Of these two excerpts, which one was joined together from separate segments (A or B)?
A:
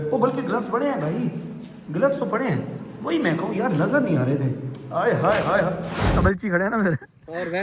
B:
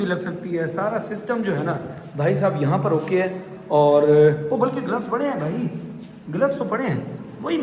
A